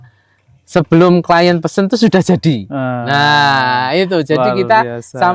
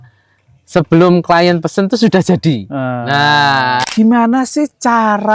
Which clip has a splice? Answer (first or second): second